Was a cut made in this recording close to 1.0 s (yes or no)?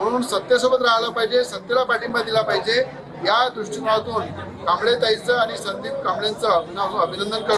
no